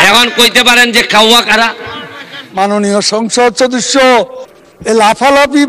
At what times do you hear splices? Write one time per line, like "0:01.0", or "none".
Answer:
0:02.5